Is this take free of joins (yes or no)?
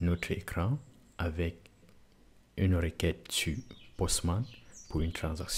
no